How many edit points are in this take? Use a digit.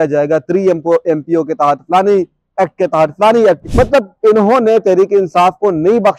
1